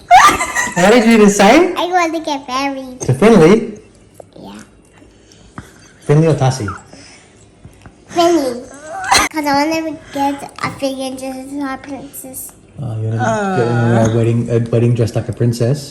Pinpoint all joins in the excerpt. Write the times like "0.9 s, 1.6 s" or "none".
none